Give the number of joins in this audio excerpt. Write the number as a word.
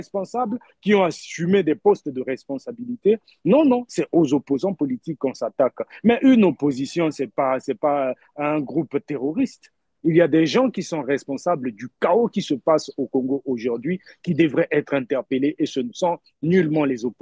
one